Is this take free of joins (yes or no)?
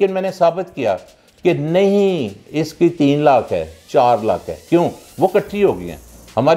yes